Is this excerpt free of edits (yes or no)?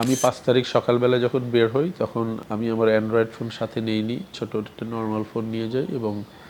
no